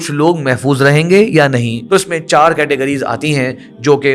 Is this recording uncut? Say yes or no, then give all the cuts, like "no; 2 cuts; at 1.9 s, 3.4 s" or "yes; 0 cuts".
no; 1 cut; at 1.7 s